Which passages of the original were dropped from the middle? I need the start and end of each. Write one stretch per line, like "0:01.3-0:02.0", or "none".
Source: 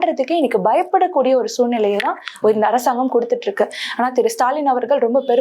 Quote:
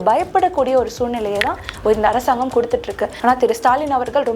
0:03.7-0:03.8